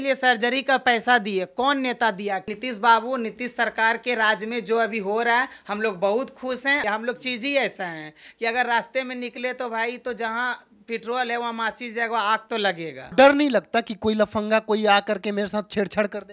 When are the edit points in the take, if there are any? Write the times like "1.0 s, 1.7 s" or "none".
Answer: 2.5 s, 6.8 s, 13.0 s